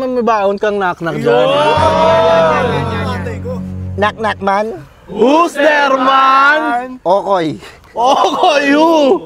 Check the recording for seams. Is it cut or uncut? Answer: uncut